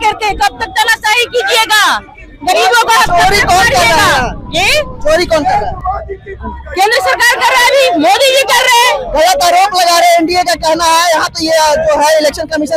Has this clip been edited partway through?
no; 0 cuts

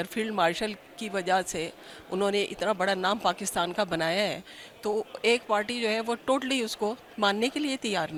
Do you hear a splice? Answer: no; 0 cuts

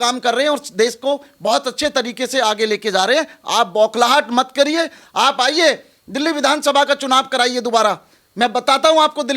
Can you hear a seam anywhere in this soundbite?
no; 0 cuts

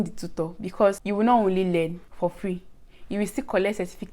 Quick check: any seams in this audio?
yes; 2 cuts; at 1.0 s, 2.0 s

